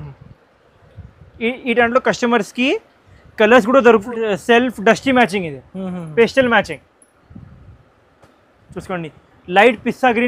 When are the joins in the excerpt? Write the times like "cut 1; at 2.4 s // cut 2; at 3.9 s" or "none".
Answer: cut 1; at 3.9 s